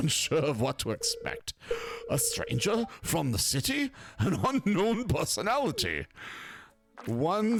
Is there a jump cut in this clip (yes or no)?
no